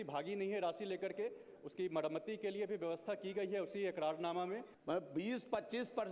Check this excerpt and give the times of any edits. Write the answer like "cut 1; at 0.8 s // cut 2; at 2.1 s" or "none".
cut 1; at 4.7 s